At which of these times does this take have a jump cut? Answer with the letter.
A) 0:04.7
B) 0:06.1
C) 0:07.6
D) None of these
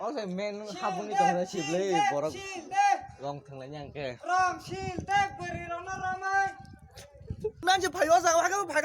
C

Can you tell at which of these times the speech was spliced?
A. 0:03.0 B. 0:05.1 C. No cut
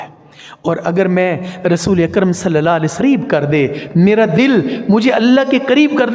A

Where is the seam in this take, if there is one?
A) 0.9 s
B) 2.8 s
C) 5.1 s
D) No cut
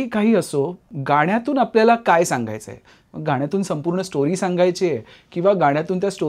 A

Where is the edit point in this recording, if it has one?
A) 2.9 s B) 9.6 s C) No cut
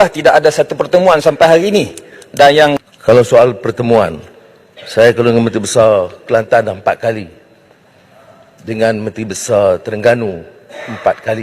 A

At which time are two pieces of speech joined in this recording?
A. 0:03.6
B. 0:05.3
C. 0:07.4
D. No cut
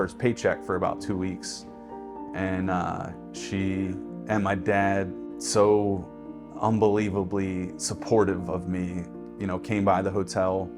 B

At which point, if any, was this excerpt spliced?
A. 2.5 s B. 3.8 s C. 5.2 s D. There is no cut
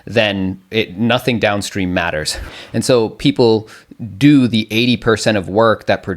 A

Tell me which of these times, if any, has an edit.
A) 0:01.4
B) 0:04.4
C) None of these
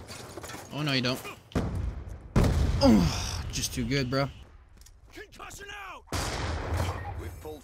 B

